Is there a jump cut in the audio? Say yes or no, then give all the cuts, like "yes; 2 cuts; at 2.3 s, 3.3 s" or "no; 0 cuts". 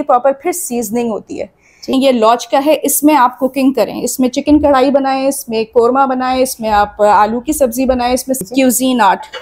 yes; 2 cuts; at 1.9 s, 8.4 s